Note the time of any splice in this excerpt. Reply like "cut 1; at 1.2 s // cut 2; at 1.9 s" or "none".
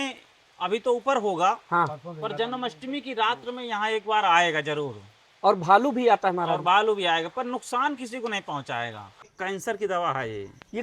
cut 1; at 9.2 s

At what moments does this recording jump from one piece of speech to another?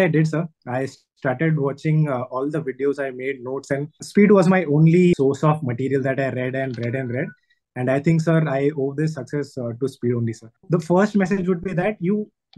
cut 1; at 4.0 s // cut 2; at 5.1 s // cut 3; at 10.6 s

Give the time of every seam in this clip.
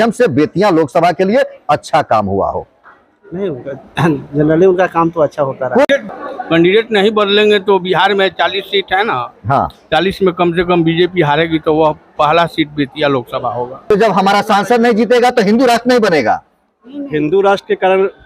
cut 1; at 5.8 s // cut 2; at 13.8 s

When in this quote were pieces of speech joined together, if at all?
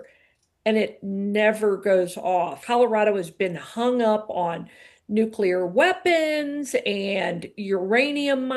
cut 1; at 2.6 s

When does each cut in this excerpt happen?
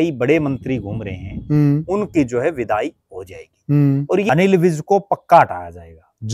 cut 1; at 4.2 s

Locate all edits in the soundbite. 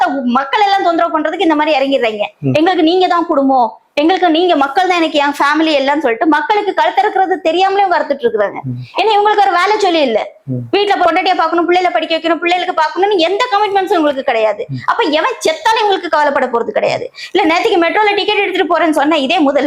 none

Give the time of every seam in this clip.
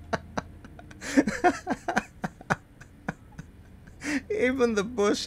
none

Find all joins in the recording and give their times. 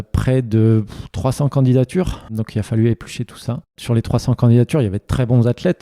cut 1; at 2.4 s // cut 2; at 3.8 s

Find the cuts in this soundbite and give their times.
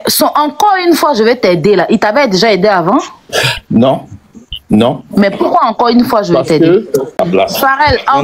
cut 1; at 7.1 s

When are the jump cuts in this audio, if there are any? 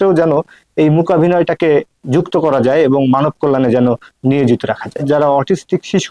cut 1; at 5.0 s

